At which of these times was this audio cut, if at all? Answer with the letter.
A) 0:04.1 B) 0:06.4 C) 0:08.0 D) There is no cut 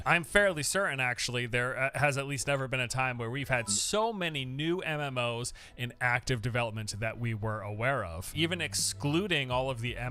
C